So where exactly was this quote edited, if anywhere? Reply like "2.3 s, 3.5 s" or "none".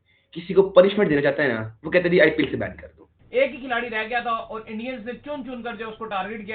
3.2 s